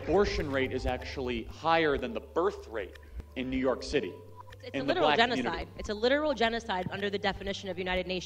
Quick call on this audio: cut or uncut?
uncut